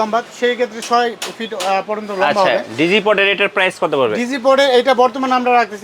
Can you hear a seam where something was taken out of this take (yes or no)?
no